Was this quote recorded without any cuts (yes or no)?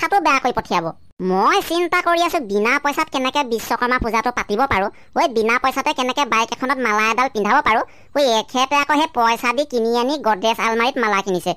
yes